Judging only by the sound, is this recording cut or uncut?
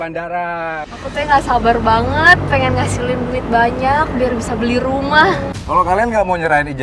cut